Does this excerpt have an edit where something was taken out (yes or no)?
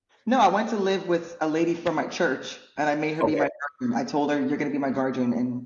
no